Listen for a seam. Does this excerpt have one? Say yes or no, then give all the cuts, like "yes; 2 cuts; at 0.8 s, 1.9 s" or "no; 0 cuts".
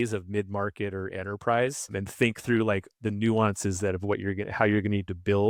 no; 0 cuts